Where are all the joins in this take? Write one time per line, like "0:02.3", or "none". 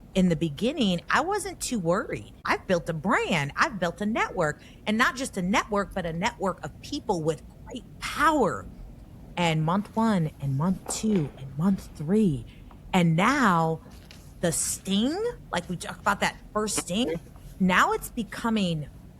0:02.4